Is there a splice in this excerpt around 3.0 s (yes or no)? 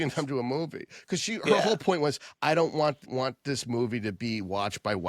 yes